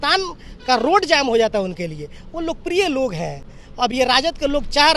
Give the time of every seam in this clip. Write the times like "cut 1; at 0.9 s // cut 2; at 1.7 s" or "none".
none